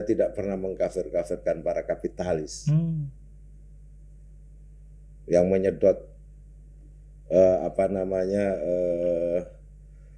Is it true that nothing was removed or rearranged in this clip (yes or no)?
yes